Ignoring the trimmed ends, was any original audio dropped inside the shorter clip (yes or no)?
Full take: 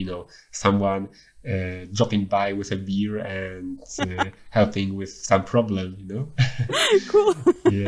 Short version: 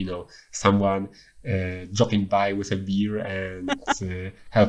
no